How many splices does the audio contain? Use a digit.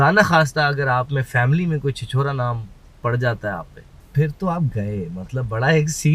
1